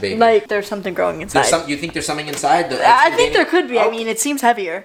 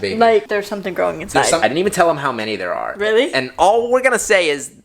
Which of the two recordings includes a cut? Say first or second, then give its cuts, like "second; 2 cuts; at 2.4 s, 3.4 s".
second; 1 cut; at 1.6 s